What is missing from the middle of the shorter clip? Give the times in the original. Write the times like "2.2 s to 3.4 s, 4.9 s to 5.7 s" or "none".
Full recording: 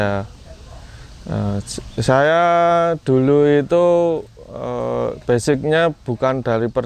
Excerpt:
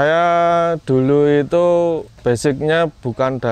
4.3 s to 5.2 s